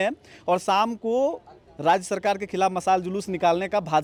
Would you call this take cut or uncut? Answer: uncut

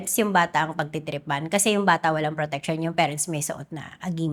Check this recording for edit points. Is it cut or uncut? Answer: uncut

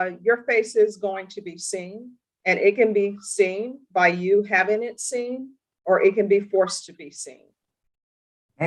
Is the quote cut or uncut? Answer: uncut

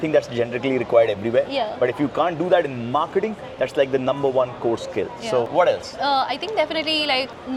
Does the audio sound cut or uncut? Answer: uncut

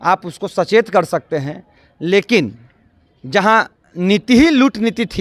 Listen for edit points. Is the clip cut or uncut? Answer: uncut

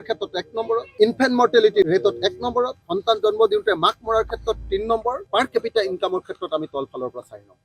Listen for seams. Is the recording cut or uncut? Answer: cut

